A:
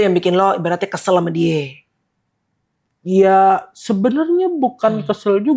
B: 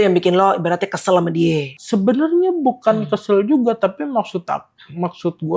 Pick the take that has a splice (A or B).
B